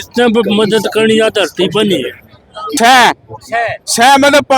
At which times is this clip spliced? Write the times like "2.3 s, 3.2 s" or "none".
2.6 s